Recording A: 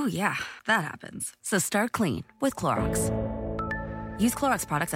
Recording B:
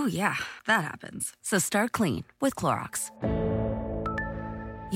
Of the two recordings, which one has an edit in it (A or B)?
A